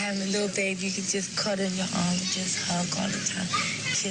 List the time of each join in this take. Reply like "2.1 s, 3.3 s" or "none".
none